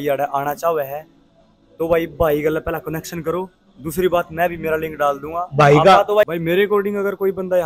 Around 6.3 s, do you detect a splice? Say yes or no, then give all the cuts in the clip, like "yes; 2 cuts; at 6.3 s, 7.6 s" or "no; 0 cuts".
yes; 1 cut; at 6.3 s